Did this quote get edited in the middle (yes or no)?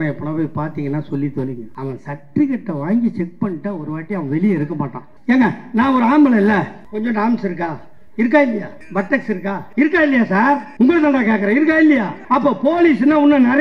yes